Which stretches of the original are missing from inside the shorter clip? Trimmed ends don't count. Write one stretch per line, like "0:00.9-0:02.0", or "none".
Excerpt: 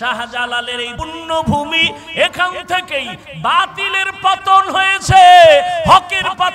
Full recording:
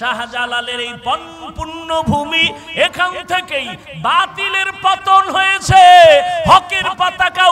0:00.9-0:01.5